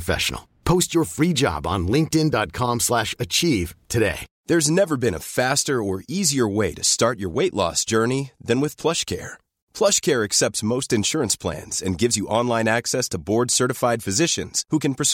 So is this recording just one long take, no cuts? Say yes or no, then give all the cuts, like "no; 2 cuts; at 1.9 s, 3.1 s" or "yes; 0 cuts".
no; 1 cut; at 4.3 s